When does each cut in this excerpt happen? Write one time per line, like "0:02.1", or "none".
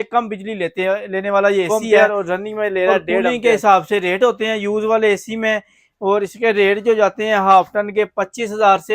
0:01.7
0:03.3

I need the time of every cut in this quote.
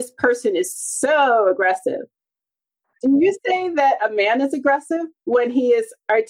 0:02.9

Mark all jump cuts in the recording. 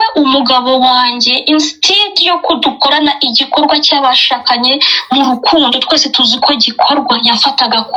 none

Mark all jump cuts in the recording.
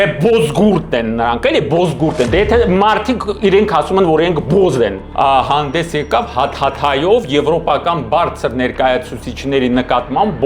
0:05.0

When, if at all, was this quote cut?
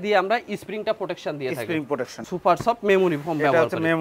0:02.2

